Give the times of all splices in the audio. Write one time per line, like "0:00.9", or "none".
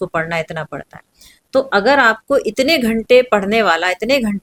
none